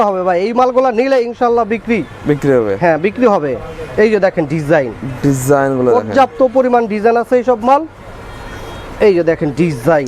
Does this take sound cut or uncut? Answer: uncut